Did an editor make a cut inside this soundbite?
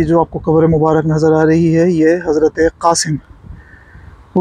no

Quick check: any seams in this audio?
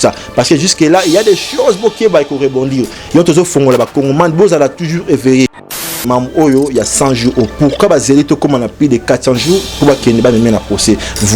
yes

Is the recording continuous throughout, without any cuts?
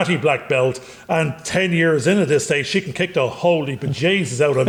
yes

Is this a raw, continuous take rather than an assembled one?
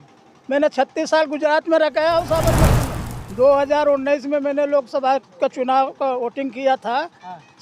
no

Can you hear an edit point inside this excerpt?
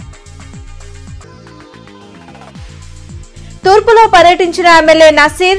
yes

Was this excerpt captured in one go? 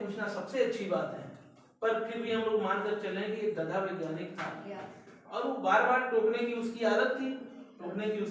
yes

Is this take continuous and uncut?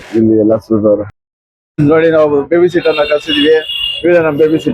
no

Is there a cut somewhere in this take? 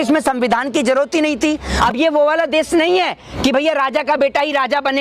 yes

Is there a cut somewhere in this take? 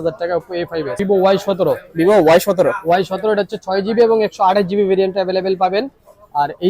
yes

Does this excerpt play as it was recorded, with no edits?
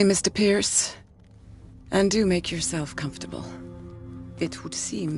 yes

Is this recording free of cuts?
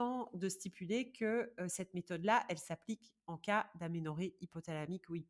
yes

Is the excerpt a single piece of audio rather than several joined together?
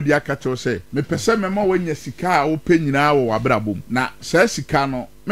no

